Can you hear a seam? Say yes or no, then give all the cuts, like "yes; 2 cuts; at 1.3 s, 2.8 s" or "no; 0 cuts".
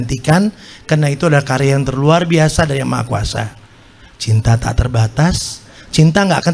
no; 0 cuts